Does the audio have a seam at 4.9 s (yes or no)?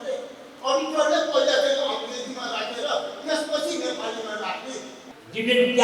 yes